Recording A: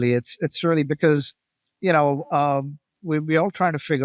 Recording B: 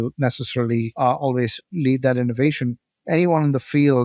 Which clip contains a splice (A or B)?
B